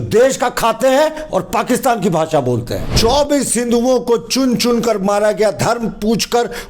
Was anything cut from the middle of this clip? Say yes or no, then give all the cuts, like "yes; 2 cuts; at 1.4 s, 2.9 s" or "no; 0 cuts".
yes; 1 cut; at 2.9 s